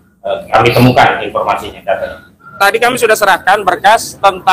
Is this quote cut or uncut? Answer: cut